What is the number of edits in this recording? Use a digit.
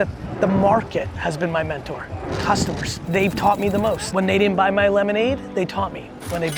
4